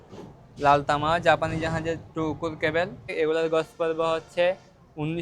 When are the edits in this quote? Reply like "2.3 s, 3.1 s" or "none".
3.1 s